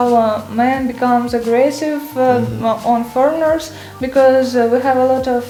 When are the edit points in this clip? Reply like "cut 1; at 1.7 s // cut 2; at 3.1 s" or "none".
none